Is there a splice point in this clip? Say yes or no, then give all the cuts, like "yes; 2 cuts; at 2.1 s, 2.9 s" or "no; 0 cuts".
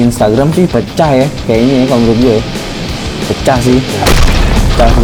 no; 0 cuts